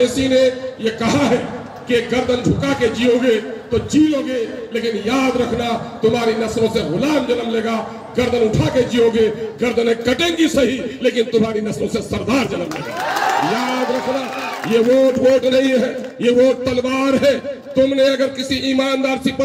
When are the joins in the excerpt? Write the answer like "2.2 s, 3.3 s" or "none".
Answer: none